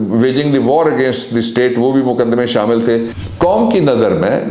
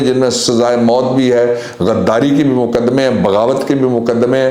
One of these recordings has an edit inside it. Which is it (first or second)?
first